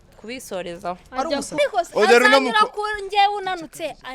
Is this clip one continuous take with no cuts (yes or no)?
no